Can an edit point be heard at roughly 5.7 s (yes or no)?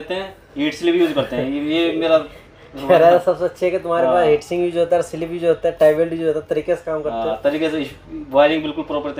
no